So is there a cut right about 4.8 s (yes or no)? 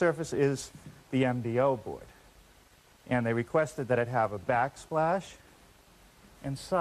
no